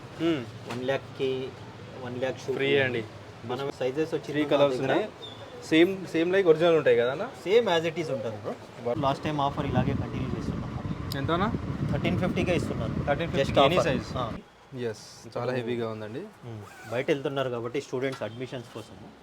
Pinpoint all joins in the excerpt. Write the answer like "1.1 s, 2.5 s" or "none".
3.7 s, 9.0 s, 14.4 s